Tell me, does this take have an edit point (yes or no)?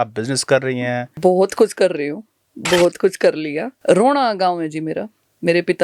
yes